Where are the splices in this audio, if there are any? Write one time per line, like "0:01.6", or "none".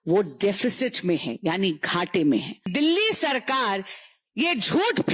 0:02.7